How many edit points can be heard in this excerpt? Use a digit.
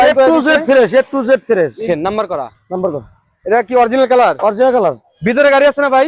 2